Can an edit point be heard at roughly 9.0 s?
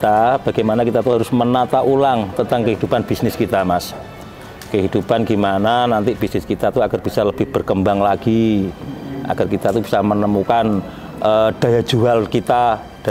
no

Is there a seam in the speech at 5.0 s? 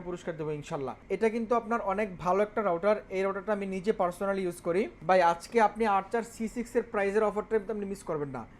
yes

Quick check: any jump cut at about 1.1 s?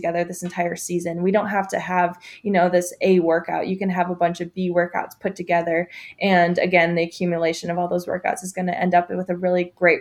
no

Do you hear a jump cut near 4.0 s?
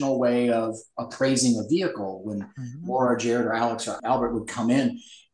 yes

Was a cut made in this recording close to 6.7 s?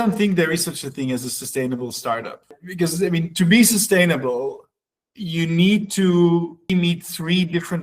yes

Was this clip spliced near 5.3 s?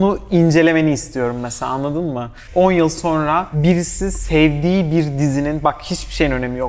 no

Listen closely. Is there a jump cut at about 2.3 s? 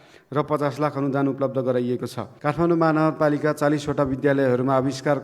yes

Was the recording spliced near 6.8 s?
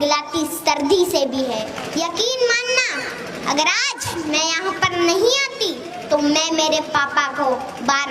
no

